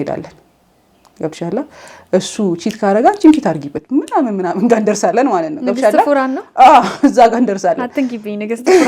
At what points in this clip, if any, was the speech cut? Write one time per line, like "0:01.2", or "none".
none